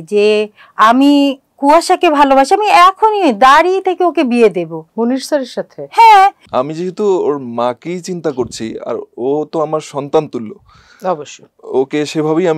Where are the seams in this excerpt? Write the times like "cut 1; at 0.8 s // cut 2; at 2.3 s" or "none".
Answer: cut 1; at 6.4 s